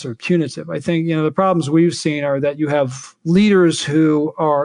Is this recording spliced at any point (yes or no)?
no